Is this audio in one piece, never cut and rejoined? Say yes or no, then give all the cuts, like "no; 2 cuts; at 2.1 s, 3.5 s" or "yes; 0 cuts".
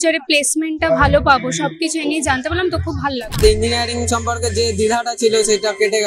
no; 1 cut; at 3.3 s